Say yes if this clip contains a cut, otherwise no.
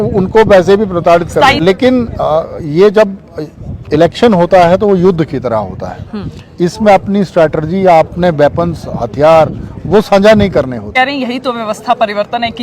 yes